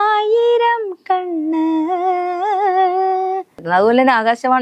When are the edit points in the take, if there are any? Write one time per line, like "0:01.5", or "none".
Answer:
0:03.6